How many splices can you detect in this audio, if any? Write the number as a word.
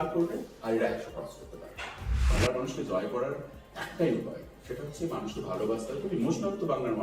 one